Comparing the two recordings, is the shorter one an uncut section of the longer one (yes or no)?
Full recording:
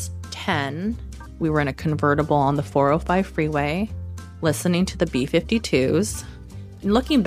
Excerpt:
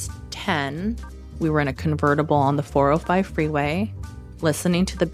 yes